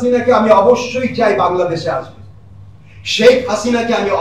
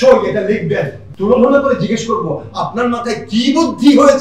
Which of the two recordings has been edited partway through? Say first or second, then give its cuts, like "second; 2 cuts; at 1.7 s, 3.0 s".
second; 1 cut; at 1.0 s